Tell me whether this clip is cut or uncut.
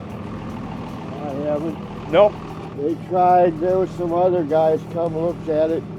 uncut